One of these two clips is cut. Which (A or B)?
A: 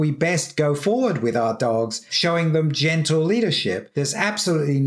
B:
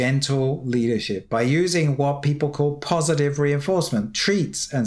A